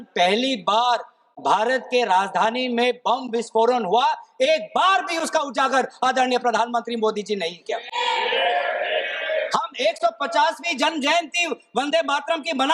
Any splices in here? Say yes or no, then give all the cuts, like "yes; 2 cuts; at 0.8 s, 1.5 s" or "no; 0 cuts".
no; 0 cuts